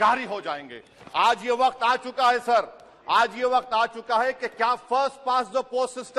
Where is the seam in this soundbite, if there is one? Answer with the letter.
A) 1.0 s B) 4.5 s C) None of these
C